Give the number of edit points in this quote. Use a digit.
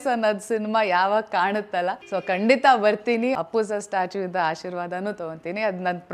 2